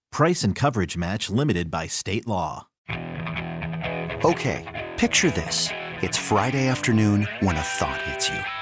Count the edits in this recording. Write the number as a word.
one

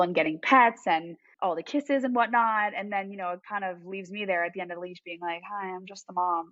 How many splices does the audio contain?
zero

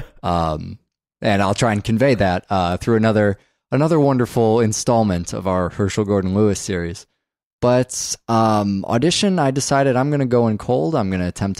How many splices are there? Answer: one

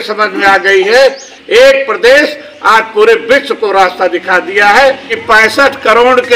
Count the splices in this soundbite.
two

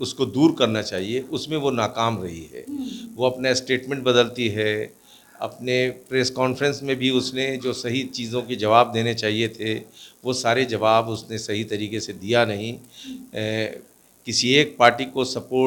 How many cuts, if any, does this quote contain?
zero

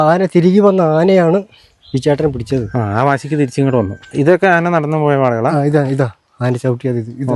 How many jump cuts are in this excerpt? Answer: one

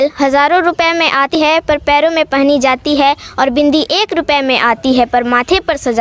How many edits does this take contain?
one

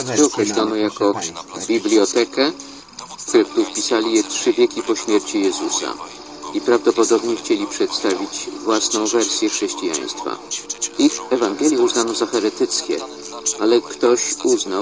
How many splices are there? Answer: one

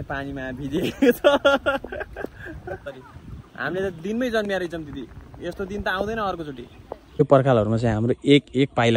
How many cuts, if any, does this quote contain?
two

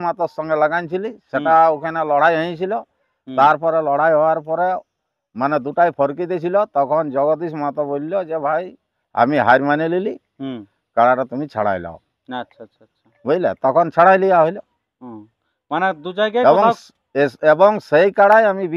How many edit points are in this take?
zero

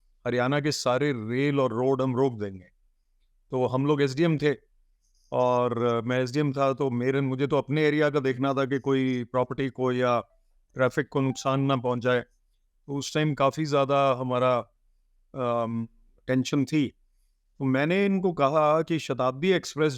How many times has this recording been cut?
zero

